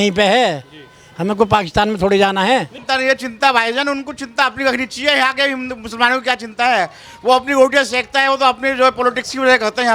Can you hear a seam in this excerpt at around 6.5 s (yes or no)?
no